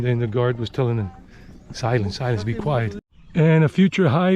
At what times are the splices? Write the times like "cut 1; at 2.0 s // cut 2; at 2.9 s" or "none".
cut 1; at 3.0 s